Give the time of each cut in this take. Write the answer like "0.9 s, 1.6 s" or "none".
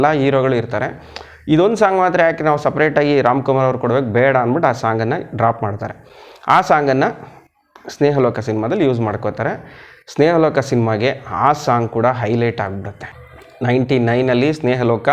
none